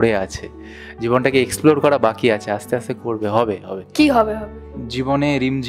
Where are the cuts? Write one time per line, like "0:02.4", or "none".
0:03.8